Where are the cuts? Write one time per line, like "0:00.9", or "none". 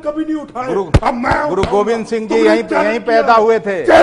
none